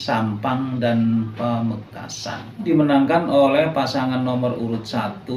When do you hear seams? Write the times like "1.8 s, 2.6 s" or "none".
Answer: 2.7 s